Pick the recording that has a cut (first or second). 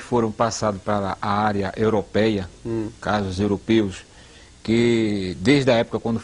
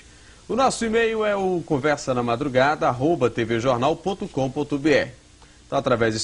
second